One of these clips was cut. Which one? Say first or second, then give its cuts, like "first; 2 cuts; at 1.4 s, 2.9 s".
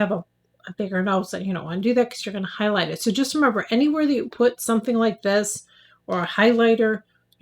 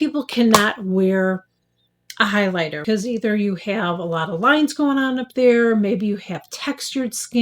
second; 1 cut; at 2.8 s